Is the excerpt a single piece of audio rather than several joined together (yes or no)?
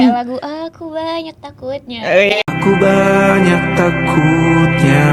no